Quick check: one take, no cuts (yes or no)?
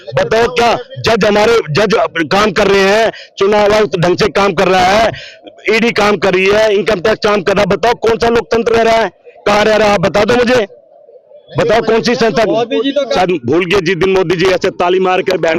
no